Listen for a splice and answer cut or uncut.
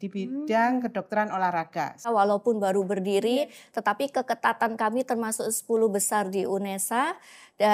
cut